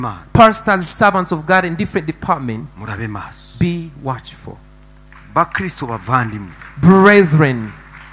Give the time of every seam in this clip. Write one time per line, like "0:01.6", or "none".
none